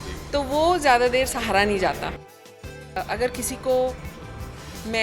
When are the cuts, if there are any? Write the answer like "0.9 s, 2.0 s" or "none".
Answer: 2.4 s